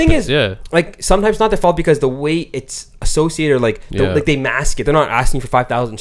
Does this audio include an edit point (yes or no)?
no